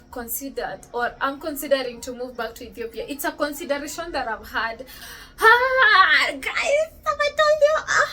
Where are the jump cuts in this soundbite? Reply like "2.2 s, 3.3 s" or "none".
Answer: 5.0 s